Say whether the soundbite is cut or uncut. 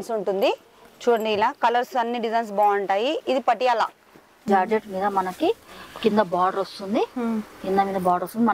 cut